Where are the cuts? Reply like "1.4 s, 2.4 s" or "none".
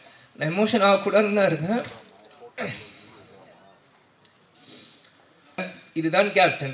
5.8 s